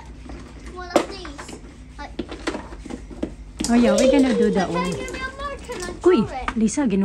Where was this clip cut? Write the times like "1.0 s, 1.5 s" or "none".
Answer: none